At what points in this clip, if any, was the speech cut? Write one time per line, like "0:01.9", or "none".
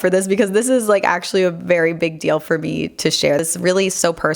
0:03.4